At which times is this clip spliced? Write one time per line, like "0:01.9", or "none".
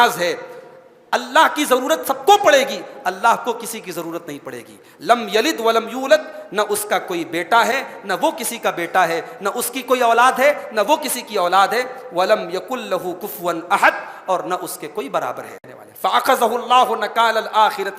0:15.7